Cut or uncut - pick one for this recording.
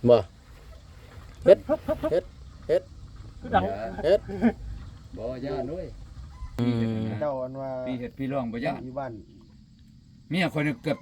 cut